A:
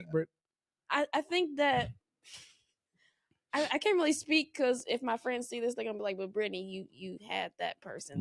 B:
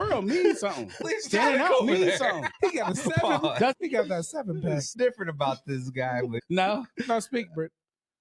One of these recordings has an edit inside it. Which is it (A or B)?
B